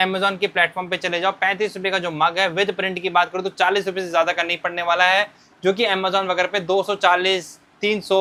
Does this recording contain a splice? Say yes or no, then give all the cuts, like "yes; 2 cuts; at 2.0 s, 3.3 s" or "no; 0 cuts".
no; 0 cuts